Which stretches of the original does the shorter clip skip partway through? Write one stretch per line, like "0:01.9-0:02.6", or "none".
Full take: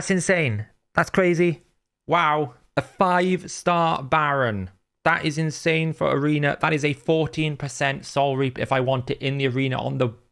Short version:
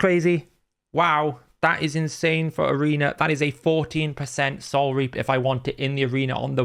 0:02.6-0:04.9